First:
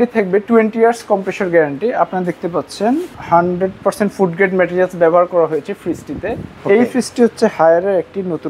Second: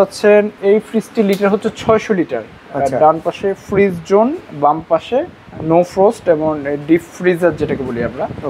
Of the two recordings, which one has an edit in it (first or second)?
first